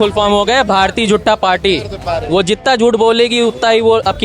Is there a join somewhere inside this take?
no; 0 cuts

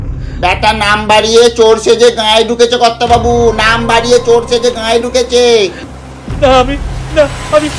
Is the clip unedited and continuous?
no; 1 cut; at 6.0 s

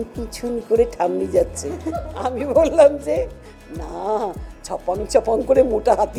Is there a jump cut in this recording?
no; 0 cuts

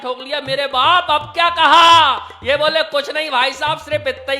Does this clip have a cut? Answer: no; 0 cuts

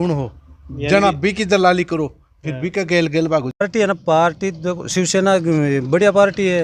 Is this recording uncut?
no; 1 cut; at 3.6 s

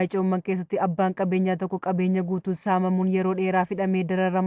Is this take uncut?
yes; 0 cuts

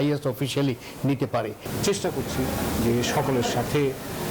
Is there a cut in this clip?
yes; 1 cut; at 1.6 s

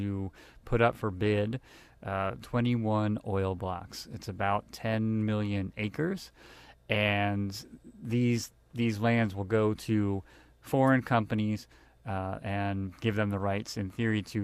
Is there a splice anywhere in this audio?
yes; 1 cut; at 3.4 s

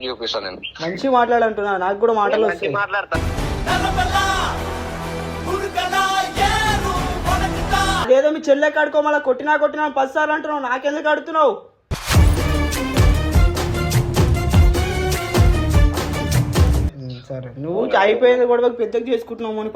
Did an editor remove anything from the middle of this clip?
yes; 2 cuts; at 8.1 s, 16.9 s

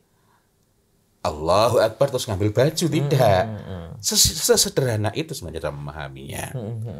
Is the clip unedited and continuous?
yes; 0 cuts

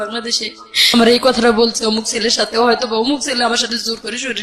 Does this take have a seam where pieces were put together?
yes; 1 cut; at 0.9 s

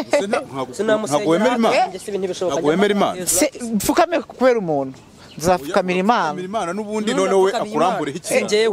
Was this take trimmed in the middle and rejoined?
no; 0 cuts

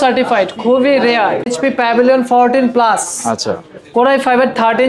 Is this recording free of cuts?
no; 1 cut; at 1.5 s

